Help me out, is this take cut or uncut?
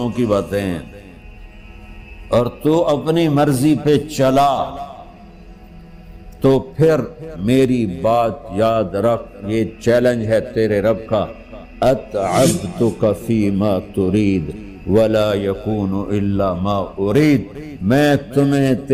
uncut